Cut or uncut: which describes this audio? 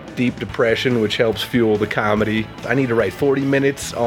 cut